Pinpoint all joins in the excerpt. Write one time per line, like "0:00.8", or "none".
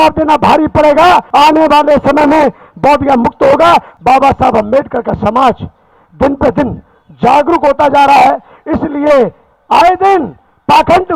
0:01.3
0:03.9